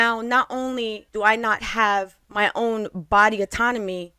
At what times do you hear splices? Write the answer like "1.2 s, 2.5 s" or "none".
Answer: 1.0 s, 2.2 s